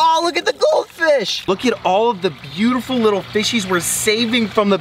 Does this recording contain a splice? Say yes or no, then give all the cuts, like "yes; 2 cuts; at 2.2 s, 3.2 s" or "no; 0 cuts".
yes; 1 cut; at 1.4 s